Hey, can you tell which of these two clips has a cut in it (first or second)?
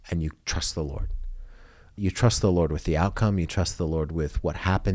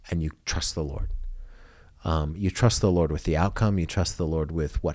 first